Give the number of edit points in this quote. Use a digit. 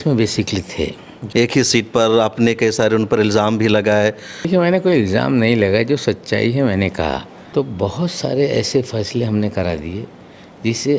3